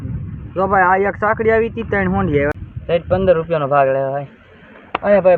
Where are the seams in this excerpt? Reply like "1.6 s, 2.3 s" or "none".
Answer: 2.6 s